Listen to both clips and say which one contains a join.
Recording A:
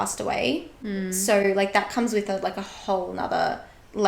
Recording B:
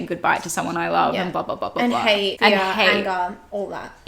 B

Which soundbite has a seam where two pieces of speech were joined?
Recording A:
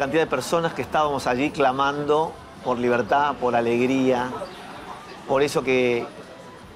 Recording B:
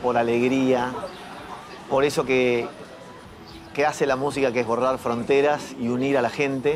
A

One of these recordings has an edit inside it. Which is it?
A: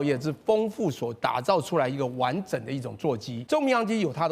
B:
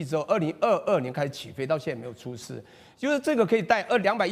A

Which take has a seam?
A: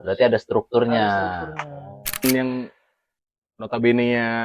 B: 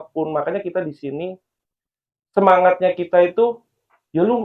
A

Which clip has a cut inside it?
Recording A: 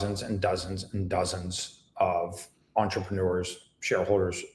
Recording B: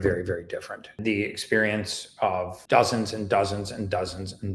B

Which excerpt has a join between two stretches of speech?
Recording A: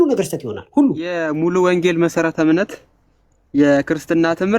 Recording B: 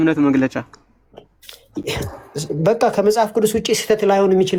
A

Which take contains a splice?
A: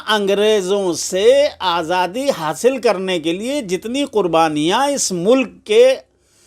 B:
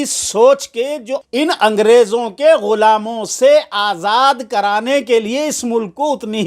B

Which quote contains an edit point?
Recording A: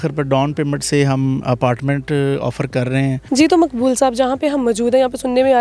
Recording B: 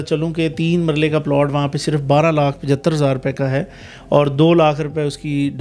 A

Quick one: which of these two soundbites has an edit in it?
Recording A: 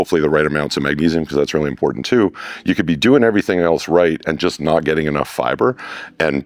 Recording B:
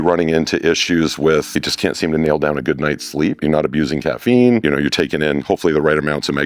B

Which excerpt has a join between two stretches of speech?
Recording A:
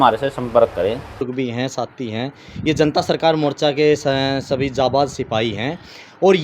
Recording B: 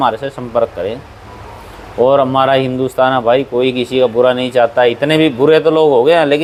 A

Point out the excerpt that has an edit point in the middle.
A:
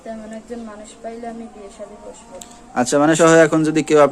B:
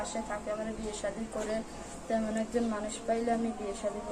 A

